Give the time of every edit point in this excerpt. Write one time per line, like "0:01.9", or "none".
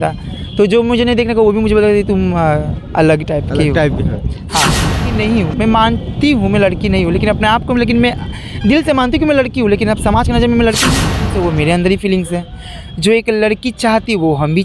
0:05.0
0:11.3